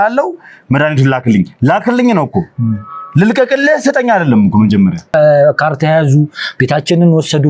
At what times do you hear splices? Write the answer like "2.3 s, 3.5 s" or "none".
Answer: 5.1 s